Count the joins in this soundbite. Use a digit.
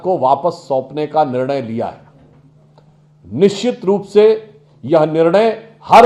0